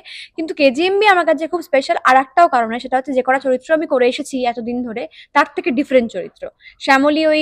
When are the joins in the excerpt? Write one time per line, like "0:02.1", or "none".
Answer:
none